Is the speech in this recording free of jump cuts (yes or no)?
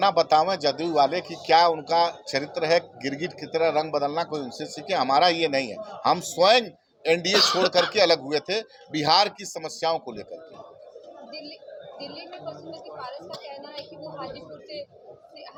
yes